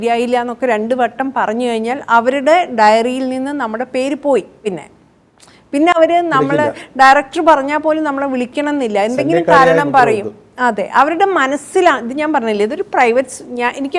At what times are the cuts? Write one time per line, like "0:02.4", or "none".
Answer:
none